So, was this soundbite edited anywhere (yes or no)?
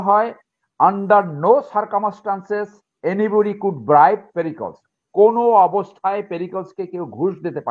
no